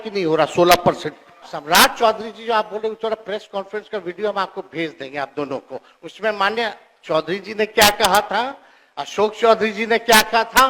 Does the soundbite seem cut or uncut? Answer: cut